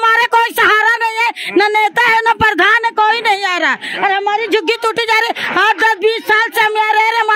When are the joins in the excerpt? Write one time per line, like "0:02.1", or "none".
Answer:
none